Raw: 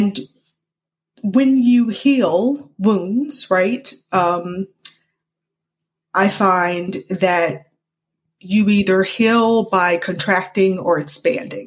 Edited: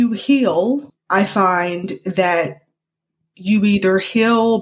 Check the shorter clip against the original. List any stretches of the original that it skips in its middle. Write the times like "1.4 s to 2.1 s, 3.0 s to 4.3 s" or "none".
2.7 s to 6.0 s

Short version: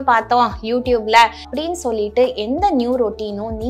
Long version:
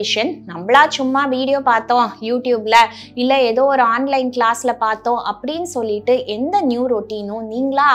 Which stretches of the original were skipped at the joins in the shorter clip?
3.0 s to 5.4 s

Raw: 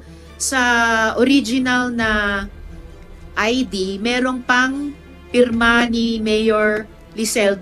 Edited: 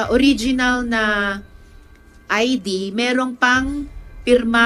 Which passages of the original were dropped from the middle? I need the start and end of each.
none

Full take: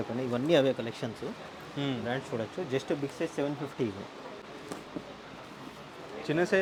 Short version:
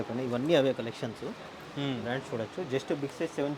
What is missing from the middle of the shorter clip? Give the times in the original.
none

